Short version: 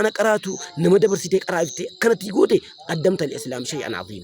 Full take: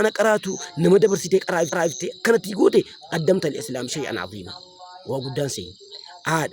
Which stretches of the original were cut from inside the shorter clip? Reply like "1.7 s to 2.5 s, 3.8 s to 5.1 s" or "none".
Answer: 1.6 s to 1.8 s

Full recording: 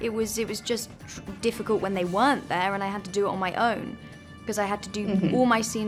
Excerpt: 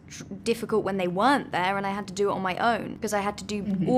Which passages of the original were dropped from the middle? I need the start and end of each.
3.9 s to 4.4 s

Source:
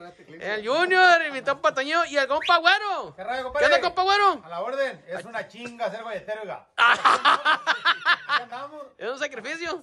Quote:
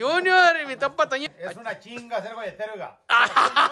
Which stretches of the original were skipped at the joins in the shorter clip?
1.9 s to 4.9 s

